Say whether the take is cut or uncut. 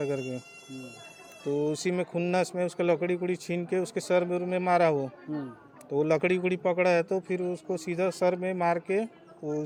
uncut